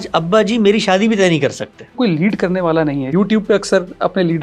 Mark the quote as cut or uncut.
cut